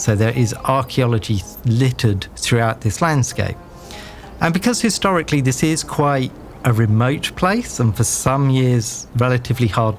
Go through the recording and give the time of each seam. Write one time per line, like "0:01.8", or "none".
0:02.3
0:09.0